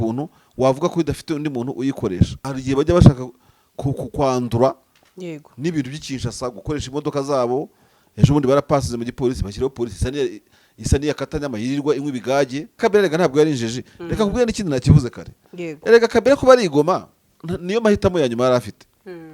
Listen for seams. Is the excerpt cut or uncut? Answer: cut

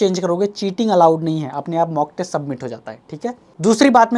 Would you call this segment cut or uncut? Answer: uncut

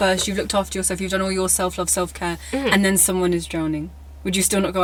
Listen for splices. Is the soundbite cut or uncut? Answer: uncut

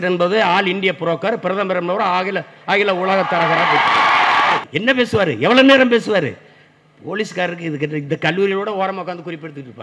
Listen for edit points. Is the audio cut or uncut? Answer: cut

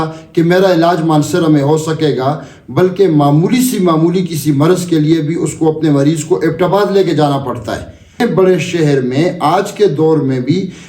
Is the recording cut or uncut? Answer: cut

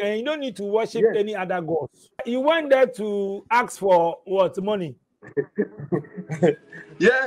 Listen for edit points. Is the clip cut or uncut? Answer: cut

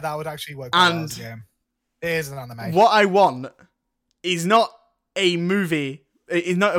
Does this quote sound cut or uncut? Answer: uncut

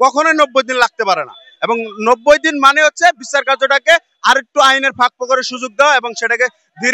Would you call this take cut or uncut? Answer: uncut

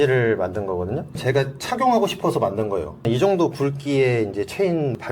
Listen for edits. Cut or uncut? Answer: uncut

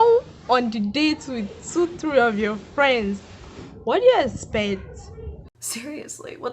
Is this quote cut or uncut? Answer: cut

